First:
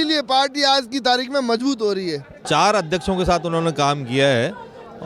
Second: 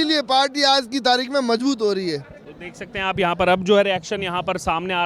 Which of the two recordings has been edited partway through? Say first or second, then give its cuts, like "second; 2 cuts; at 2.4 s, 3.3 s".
first; 1 cut; at 2.3 s